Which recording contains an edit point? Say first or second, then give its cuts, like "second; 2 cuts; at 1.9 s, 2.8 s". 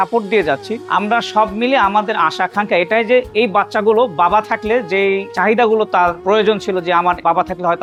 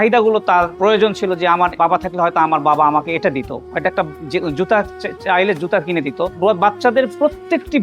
second; 1 cut; at 3.6 s